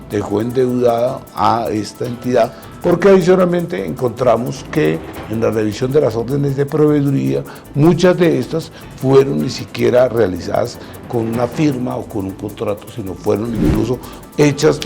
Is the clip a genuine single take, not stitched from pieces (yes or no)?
no